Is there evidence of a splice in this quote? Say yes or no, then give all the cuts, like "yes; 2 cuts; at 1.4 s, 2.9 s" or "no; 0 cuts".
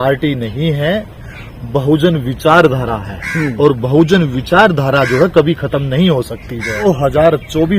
yes; 1 cut; at 6.9 s